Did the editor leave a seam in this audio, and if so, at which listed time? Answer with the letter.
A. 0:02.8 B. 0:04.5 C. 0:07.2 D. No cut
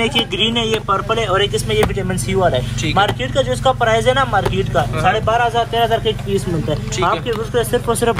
D